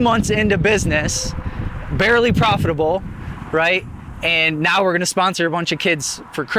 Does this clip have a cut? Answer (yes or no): no